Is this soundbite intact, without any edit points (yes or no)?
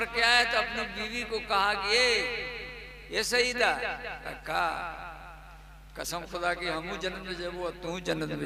yes